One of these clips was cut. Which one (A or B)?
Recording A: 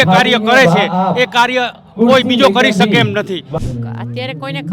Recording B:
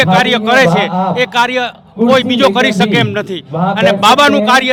A